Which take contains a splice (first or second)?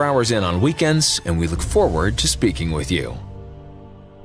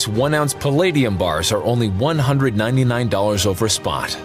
first